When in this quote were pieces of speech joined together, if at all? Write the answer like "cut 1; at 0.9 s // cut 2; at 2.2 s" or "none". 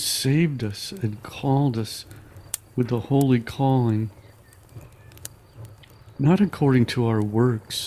cut 1; at 4.1 s // cut 2; at 6.2 s